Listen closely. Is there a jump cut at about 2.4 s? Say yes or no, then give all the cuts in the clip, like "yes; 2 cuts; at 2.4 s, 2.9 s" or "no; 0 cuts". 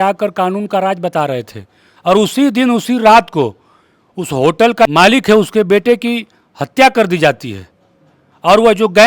no; 1 cut; at 4.9 s